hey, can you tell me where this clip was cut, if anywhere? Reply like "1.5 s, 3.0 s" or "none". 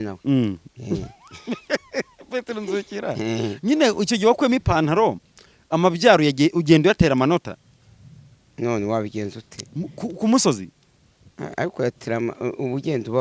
none